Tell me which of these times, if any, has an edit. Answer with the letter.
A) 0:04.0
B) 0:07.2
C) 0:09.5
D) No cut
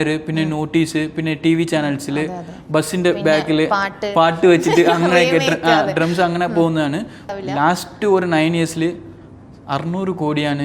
B